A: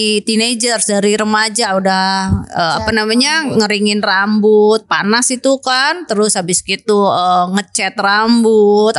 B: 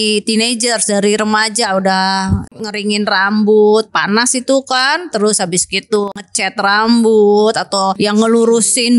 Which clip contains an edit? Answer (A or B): B